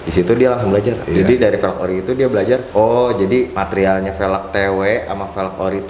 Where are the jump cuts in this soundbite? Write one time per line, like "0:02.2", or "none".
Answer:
0:01.0
0:02.7
0:03.6